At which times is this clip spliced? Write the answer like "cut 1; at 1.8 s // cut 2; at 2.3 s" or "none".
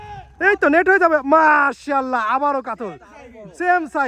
none